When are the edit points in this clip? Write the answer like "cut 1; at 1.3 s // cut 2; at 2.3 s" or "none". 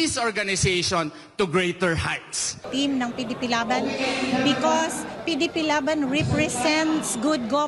cut 1; at 2.7 s